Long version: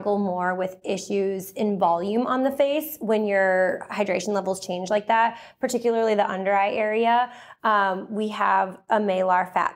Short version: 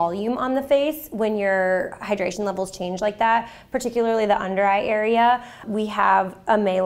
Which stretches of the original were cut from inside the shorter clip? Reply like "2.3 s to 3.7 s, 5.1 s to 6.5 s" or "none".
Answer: 7.5 s to 8.0 s